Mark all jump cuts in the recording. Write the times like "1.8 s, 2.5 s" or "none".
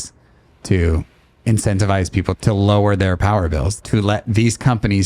2.4 s, 3.7 s